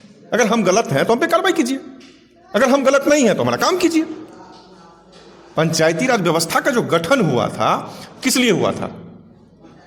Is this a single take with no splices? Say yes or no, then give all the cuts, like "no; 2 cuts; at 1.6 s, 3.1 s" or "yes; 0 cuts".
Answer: yes; 0 cuts